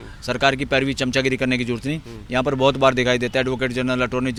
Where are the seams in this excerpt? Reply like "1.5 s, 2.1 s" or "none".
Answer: none